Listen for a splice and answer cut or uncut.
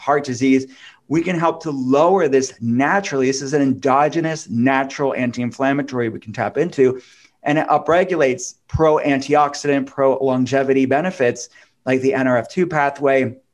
uncut